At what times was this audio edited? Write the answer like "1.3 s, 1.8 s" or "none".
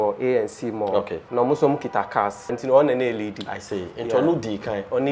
1.2 s, 2.6 s